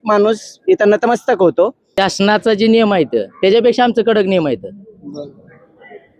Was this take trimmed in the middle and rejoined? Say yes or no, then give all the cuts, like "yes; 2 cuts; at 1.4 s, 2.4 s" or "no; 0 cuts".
yes; 1 cut; at 1.8 s